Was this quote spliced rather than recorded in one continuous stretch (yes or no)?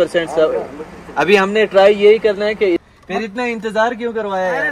yes